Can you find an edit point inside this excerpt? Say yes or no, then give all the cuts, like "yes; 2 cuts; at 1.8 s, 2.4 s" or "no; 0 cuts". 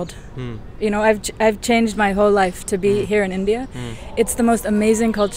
no; 0 cuts